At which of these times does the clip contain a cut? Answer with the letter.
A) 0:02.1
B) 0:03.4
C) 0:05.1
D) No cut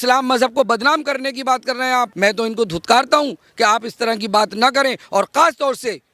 A